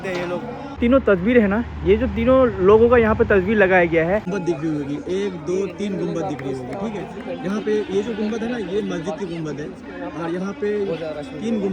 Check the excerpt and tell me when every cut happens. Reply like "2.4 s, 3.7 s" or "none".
0.8 s, 4.3 s